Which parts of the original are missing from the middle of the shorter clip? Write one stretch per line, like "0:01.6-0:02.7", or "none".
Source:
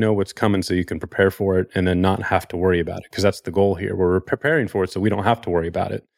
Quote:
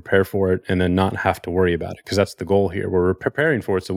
none